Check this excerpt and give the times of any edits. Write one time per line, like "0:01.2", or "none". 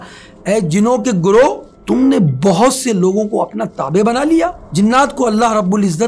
0:01.7
0:04.6